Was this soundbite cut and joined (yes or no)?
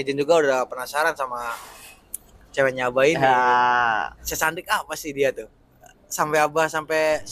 yes